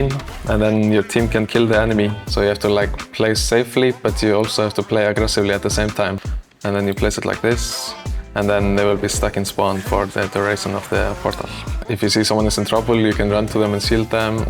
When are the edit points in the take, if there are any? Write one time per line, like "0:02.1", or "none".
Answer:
0:02.2
0:06.2
0:11.8